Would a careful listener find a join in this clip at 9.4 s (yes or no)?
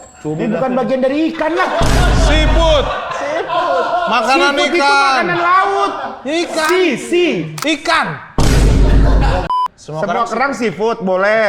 yes